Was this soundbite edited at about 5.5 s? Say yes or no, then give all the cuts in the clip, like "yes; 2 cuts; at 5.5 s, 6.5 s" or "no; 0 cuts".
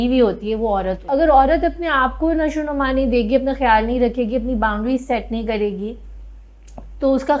no; 1 cut; at 1.1 s